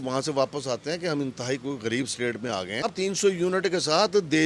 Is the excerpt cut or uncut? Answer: cut